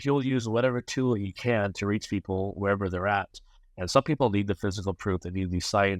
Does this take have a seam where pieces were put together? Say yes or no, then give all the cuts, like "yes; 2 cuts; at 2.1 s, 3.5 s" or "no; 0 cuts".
no; 0 cuts